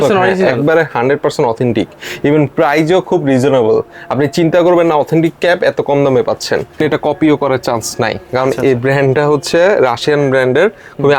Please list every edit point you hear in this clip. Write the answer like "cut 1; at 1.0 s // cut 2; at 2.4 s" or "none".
cut 1; at 6.8 s